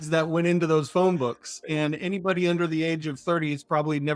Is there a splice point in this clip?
yes; 1 cut; at 1.5 s

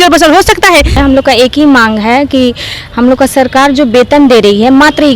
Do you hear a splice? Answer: yes; 1 cut; at 1.0 s

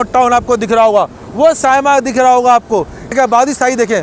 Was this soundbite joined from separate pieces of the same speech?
yes; 1 cut; at 3.1 s

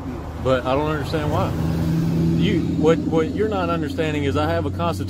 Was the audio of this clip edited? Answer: no; 0 cuts

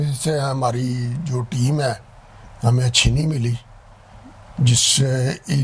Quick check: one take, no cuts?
yes; 0 cuts

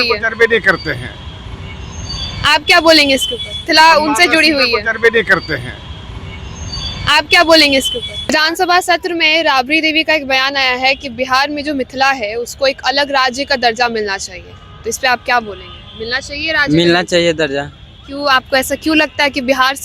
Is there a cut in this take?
yes; 1 cut; at 3.6 s

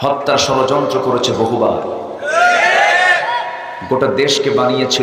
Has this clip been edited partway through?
no; 0 cuts

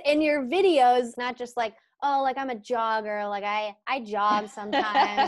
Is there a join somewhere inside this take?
yes; 1 cut; at 1.1 s

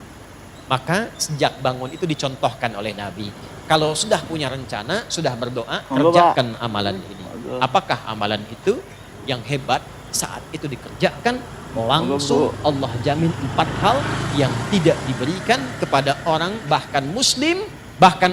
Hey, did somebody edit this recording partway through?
yes; 1 cut; at 9.1 s

